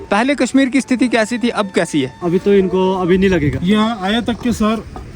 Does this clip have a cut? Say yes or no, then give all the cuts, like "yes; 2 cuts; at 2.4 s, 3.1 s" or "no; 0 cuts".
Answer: yes; 2 cuts; at 2.1 s, 3.6 s